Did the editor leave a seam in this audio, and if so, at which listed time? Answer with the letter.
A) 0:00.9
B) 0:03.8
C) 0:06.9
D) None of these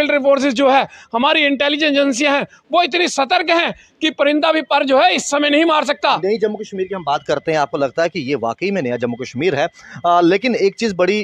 D